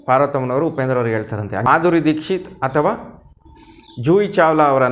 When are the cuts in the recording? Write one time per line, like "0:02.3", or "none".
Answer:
0:01.6